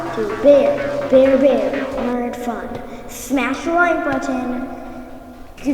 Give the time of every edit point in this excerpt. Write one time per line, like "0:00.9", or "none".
none